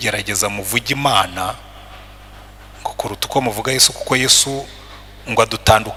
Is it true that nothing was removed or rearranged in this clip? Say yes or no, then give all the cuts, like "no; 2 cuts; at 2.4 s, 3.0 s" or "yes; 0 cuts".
yes; 0 cuts